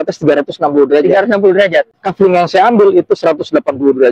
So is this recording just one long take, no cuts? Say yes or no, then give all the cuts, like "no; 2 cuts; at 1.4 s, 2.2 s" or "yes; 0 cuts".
no; 1 cut; at 2.0 s